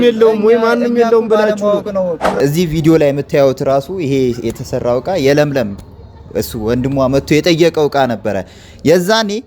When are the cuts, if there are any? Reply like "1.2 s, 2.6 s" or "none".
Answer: 2.4 s